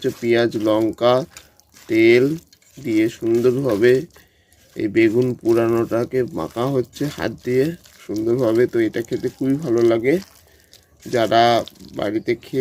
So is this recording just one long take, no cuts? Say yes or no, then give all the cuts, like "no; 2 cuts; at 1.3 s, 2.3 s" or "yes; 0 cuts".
yes; 0 cuts